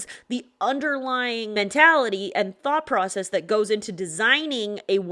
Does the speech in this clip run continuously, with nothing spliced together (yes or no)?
no